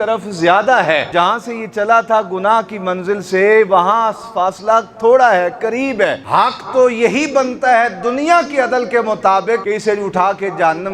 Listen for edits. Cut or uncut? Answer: cut